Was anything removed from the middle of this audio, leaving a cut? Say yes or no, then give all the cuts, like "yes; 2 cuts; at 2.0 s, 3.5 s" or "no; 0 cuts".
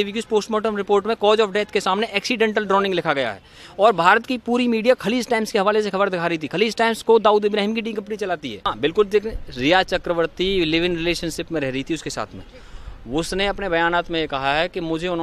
yes; 1 cut; at 8.7 s